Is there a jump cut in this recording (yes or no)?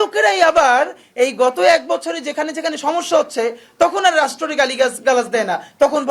no